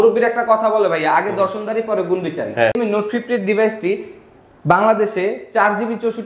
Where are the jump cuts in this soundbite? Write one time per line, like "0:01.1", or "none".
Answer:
0:02.8